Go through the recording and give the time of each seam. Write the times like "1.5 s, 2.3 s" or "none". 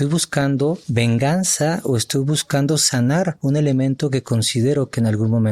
0.8 s, 3.4 s

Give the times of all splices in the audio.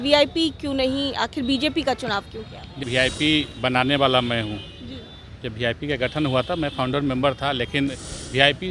2.8 s

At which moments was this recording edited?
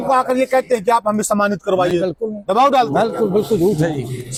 none

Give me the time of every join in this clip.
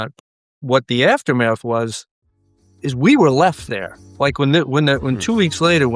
none

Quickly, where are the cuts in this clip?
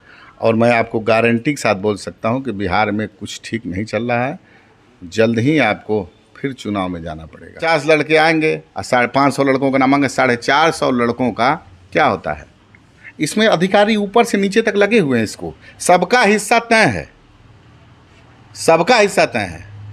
7.6 s

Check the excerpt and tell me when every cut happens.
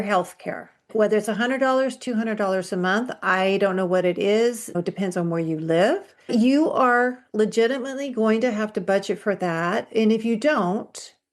0.9 s, 4.8 s, 6.3 s

